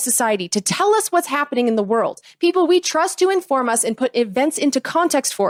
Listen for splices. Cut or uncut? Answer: uncut